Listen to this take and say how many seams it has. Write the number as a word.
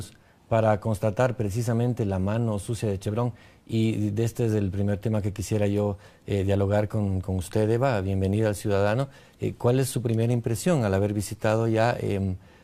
one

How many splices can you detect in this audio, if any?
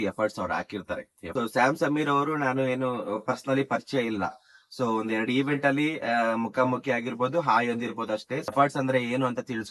two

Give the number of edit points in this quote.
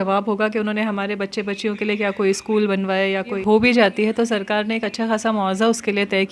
one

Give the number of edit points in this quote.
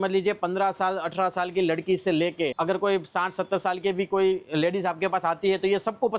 zero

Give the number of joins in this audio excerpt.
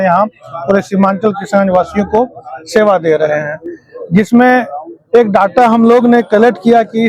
zero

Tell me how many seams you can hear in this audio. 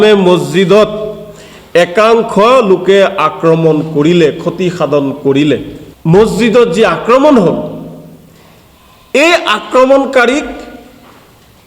one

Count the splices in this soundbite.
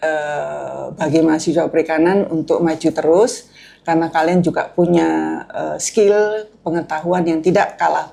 zero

